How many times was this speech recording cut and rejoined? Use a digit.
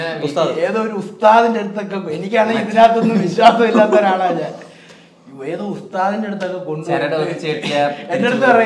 0